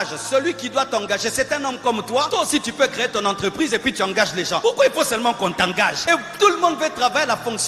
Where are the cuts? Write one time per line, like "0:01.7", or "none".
0:02.3
0:04.6
0:06.0